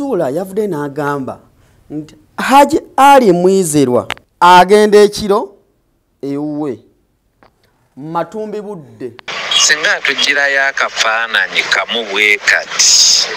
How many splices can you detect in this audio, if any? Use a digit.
2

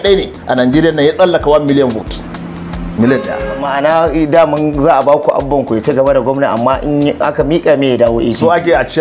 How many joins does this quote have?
1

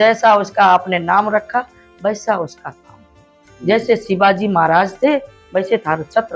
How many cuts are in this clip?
0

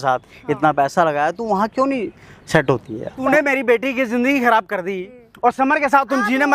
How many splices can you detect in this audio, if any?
1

